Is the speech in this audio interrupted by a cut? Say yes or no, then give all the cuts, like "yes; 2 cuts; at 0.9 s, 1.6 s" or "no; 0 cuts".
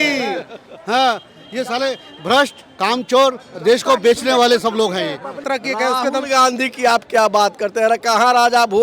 yes; 1 cut; at 5.4 s